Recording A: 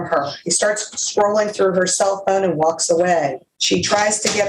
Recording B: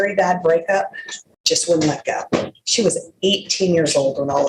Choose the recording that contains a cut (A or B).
A